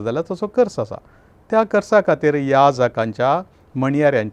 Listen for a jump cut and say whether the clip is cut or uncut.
uncut